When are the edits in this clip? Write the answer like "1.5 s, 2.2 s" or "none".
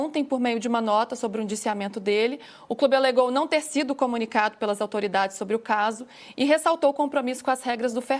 none